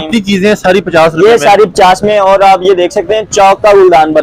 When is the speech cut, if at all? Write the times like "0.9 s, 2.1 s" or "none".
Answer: none